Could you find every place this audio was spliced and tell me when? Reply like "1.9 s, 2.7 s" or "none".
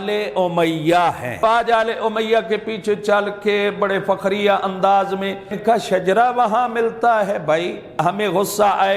1.4 s, 5.6 s, 7.9 s